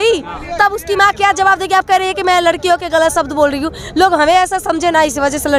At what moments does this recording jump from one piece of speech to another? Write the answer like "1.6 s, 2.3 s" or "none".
none

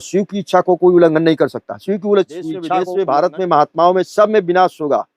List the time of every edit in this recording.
2.8 s

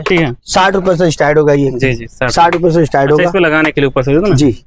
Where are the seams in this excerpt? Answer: none

